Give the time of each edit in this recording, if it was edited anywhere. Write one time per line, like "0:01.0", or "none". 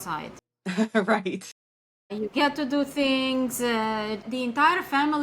0:04.2